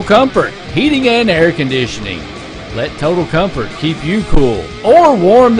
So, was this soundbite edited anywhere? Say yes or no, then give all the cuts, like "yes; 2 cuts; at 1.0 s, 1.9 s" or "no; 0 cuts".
no; 0 cuts